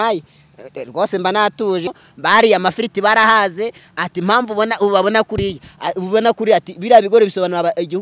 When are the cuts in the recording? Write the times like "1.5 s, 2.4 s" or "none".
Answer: 1.9 s